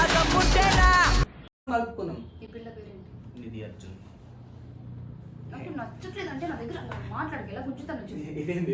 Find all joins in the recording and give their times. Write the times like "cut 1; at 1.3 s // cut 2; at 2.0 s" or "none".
cut 1; at 1.7 s